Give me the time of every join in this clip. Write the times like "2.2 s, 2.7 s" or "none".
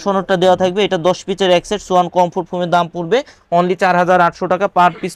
none